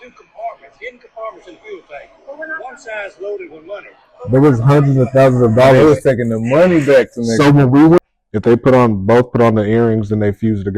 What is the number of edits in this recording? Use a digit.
1